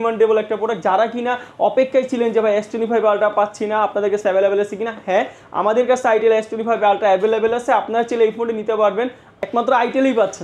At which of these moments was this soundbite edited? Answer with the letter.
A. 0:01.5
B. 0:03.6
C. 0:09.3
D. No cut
C